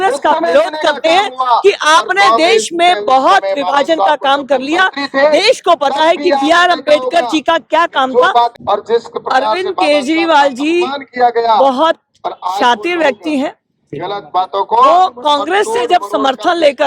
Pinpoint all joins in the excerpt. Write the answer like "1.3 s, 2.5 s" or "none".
8.5 s